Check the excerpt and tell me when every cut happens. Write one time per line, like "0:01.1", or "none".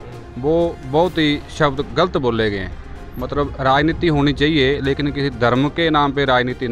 none